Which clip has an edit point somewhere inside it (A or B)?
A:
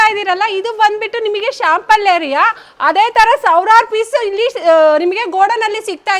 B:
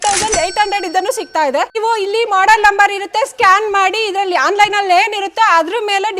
B